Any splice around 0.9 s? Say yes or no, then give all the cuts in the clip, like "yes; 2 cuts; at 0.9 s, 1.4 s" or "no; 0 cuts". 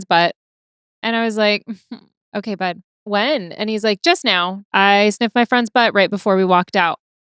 no; 3 cuts; at 2.2 s, 2.9 s, 4.6 s